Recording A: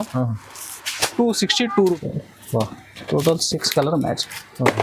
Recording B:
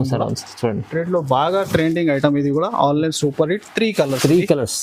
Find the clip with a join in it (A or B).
A